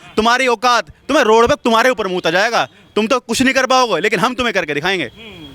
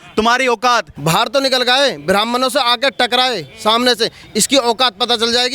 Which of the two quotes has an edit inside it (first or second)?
second